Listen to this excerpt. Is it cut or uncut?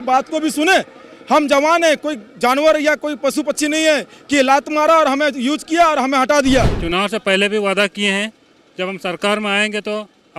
cut